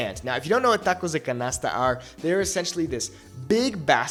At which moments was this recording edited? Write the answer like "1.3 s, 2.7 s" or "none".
none